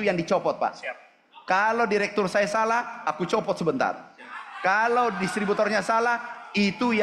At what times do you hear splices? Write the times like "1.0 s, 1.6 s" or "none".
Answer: none